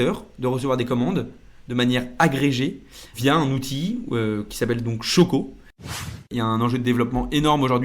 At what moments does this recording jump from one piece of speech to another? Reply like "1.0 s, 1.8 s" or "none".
6.0 s